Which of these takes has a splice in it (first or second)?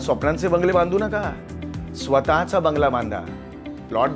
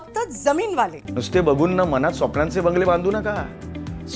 second